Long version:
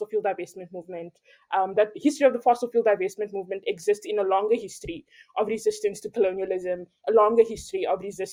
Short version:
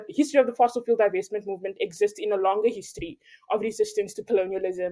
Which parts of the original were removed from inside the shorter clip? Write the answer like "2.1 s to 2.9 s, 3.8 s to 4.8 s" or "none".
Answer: none